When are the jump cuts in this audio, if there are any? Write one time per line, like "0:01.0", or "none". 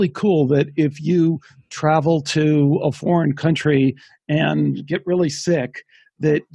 none